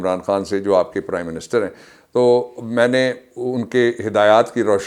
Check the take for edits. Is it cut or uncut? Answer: uncut